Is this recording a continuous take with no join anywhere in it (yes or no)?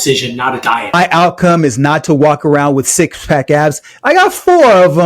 no